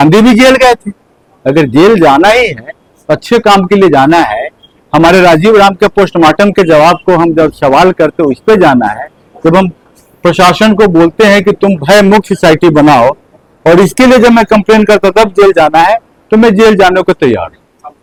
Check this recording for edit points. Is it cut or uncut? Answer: uncut